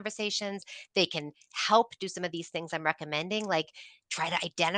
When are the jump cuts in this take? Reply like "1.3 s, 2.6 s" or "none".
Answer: none